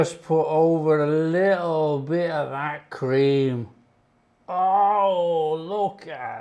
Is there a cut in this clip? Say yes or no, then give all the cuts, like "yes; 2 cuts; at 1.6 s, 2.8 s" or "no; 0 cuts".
no; 0 cuts